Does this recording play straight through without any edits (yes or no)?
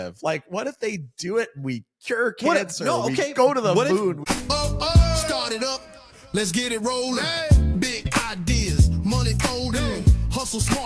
no